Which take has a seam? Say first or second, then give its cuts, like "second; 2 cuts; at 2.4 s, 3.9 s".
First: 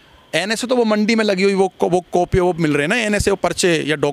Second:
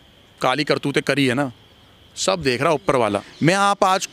second; 1 cut; at 3.0 s